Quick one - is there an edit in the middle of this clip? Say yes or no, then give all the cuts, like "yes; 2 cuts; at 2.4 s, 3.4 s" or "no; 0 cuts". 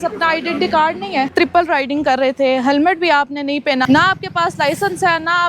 yes; 2 cuts; at 1.3 s, 3.8 s